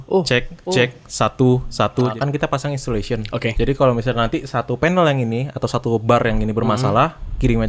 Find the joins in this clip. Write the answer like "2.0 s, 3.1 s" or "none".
2.1 s